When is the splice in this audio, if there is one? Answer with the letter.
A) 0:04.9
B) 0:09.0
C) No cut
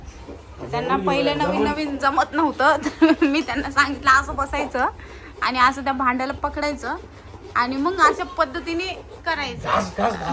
C